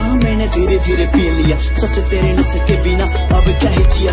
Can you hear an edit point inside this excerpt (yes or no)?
no